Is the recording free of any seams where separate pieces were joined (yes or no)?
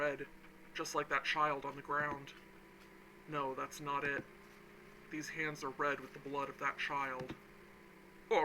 yes